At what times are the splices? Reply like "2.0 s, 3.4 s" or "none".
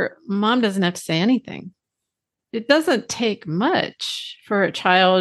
2.4 s